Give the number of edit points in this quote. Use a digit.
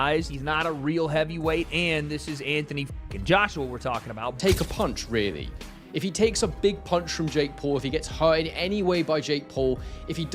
1